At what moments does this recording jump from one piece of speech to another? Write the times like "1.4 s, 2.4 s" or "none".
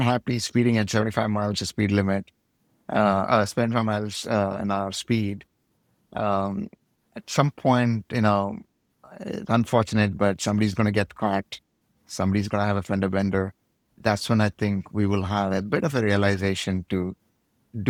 none